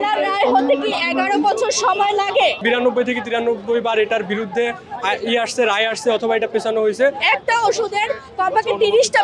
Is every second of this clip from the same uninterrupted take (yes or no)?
no